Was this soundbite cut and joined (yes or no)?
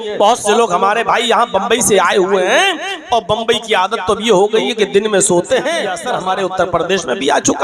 yes